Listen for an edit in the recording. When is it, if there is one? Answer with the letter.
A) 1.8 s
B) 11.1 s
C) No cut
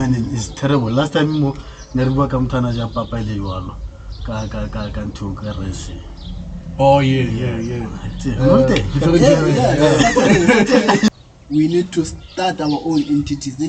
B